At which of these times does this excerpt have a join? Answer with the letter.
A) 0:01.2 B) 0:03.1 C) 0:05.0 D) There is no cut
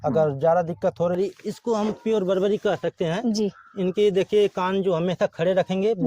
A